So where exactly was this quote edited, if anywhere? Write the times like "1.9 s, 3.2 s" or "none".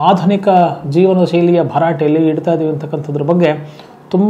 none